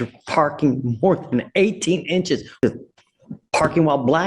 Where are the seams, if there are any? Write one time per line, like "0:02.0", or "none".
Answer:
0:02.5